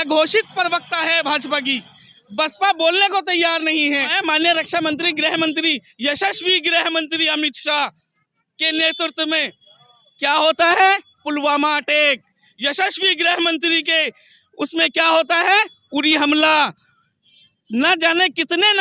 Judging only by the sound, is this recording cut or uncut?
cut